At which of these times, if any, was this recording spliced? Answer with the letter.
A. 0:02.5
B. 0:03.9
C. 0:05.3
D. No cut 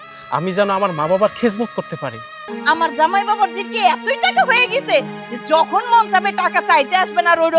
A